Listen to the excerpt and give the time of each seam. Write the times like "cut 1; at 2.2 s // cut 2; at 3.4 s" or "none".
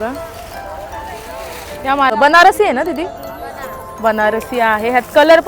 cut 1; at 2.1 s